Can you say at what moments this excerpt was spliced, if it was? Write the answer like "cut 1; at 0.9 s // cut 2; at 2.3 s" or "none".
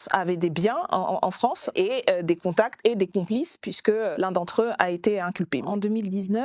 cut 1; at 1.7 s // cut 2; at 4.1 s // cut 3; at 5.6 s